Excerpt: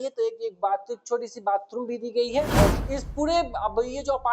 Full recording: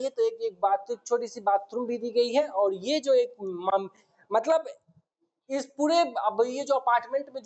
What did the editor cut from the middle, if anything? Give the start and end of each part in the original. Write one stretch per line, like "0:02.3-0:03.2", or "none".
0:02.8-0:05.4